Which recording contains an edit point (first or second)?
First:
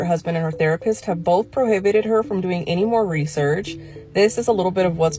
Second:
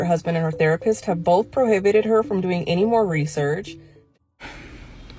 second